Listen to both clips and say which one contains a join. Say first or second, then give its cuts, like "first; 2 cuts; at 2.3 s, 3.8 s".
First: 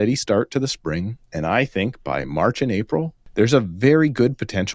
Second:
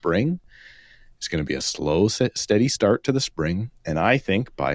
first; 1 cut; at 3.2 s